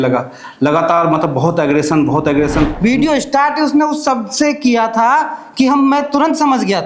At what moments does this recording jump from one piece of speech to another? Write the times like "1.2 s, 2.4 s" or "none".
2.7 s